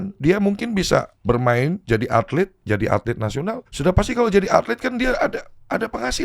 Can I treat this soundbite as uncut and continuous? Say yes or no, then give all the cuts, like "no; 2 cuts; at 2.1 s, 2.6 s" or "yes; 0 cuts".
no; 3 cuts; at 1.1 s, 2.6 s, 3.7 s